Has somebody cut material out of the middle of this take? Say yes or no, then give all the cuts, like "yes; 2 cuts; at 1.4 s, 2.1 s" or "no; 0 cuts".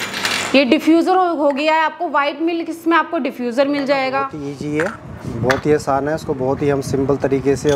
yes; 1 cut; at 4.3 s